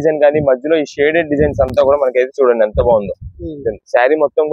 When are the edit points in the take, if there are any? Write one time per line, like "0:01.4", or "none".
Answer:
none